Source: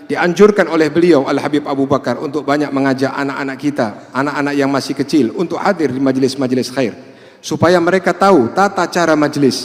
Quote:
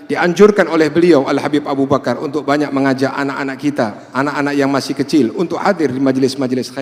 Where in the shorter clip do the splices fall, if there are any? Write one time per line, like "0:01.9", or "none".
none

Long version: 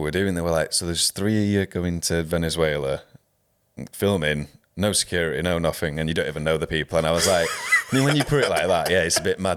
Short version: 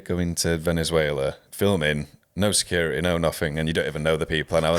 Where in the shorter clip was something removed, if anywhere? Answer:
0:01.4

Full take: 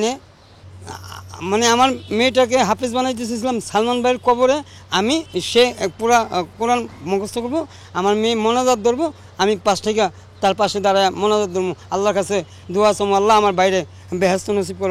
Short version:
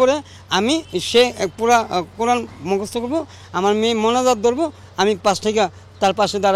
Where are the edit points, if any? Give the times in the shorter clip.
none

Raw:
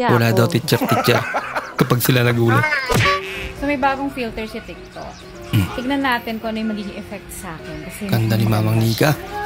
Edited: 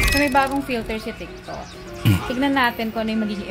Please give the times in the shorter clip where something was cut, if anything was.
none

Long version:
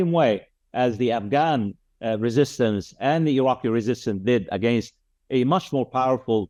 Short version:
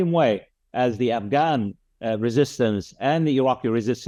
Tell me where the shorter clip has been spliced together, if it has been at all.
none

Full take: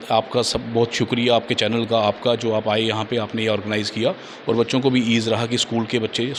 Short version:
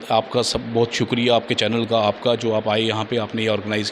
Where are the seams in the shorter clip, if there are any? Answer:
none

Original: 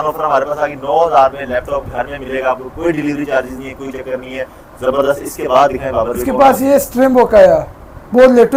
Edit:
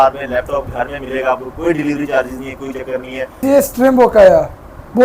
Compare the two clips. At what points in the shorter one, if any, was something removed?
0:03.4

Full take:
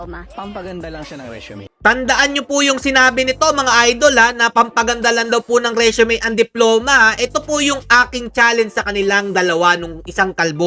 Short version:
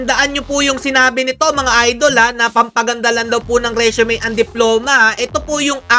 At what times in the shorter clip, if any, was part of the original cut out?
none

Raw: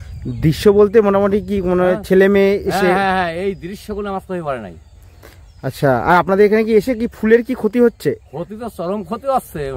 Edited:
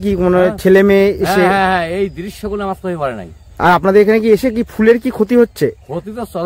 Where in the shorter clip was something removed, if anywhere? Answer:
0:03.6

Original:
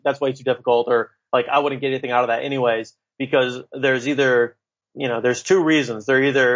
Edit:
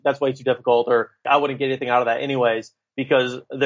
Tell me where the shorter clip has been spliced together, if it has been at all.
0:01.2

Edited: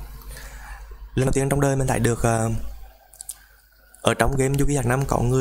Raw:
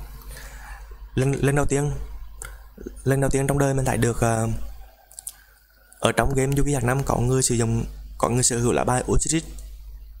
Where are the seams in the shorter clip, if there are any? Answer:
0:01.3

